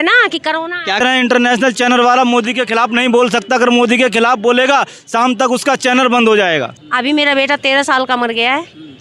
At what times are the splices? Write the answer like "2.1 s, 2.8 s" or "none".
1.0 s, 6.8 s